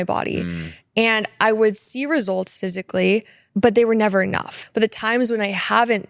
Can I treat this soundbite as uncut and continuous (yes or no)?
no